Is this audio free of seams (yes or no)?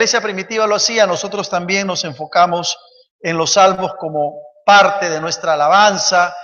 yes